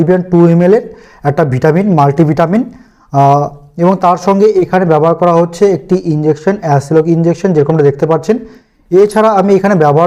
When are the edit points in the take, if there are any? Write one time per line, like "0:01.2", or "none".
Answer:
none